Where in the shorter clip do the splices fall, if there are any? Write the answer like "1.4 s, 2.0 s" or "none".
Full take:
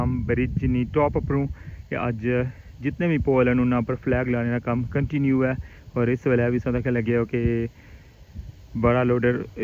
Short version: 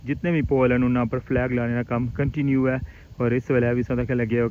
none

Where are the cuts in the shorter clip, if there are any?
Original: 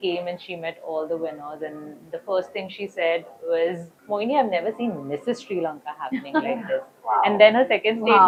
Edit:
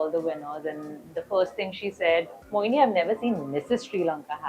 2.4 s

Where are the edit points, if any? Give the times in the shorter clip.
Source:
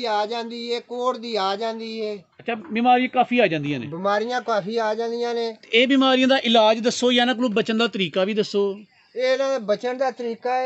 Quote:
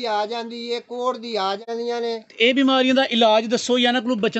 1.7 s

